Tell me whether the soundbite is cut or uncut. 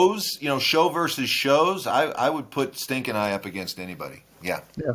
uncut